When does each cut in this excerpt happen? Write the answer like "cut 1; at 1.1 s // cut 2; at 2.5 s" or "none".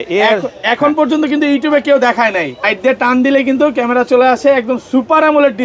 cut 1; at 2.6 s